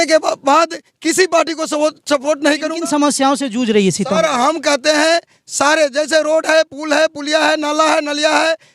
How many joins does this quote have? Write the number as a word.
one